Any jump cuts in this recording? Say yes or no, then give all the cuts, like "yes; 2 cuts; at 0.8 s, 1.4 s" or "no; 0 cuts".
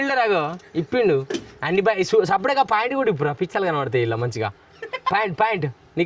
no; 0 cuts